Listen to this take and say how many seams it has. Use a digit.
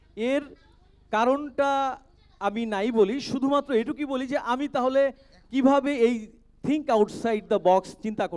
0